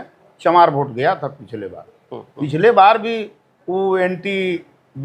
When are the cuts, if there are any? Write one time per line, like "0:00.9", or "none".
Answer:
none